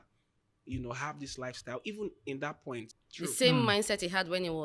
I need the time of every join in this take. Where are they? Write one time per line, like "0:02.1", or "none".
0:03.0